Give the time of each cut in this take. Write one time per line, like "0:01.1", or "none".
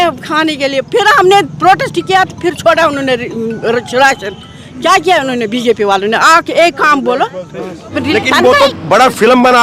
0:08.0

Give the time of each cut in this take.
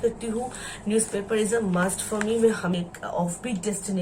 0:02.7

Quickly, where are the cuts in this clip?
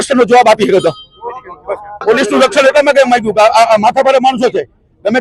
0:02.0

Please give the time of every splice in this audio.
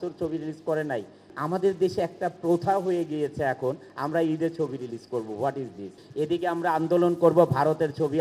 0:01.3
0:03.9
0:06.0

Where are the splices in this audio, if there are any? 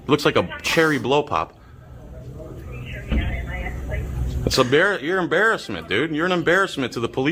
none

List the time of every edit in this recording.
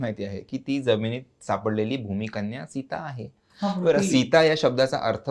none

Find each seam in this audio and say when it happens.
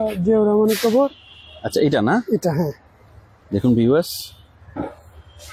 none

